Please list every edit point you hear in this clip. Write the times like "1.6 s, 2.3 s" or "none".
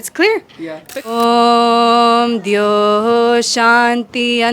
1.1 s